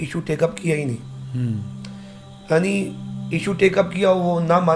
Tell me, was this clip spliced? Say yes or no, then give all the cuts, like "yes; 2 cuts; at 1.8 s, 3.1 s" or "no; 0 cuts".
no; 0 cuts